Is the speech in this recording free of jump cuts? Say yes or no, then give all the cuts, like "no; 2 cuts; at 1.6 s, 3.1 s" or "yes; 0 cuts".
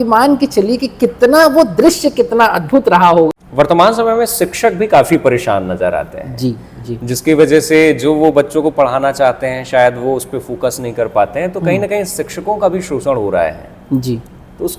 no; 1 cut; at 3.3 s